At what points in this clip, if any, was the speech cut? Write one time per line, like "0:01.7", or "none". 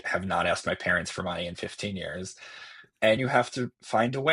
0:03.2